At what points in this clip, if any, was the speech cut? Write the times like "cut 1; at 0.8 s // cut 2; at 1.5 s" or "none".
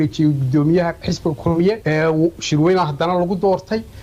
none